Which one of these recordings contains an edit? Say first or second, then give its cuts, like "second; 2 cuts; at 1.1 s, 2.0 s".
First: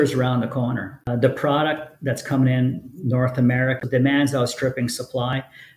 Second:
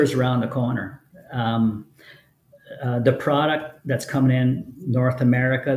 first; 2 cuts; at 1.0 s, 3.8 s